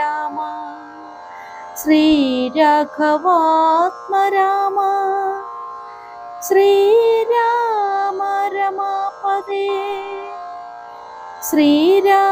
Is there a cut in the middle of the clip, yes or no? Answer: yes